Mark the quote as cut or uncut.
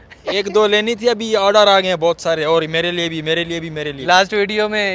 uncut